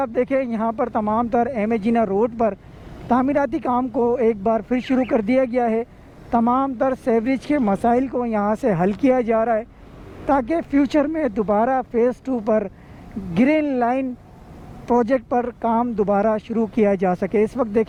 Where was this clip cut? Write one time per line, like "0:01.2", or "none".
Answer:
none